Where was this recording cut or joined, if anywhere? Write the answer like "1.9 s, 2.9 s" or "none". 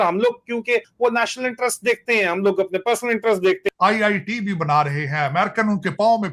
0.9 s, 3.7 s